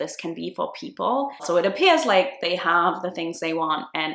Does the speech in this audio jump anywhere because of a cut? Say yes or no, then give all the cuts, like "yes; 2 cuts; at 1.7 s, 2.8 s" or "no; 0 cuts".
yes; 1 cut; at 1.4 s